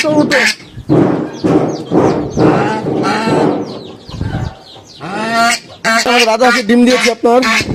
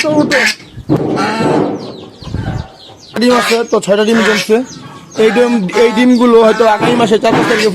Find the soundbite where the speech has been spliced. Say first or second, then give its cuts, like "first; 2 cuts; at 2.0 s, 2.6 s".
second; 2 cuts; at 1.0 s, 3.2 s